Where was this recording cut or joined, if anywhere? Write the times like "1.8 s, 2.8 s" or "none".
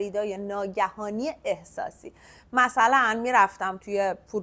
none